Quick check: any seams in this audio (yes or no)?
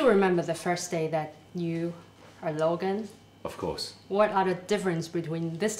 yes